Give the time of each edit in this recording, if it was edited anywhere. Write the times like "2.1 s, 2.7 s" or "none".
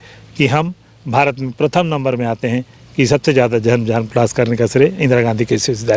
none